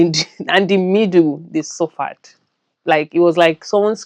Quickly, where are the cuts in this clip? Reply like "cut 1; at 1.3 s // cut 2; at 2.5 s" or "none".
none